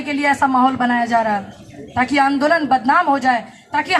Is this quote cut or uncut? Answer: uncut